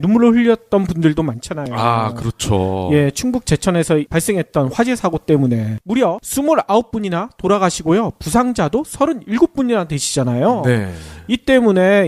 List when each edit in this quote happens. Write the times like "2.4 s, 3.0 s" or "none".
7.0 s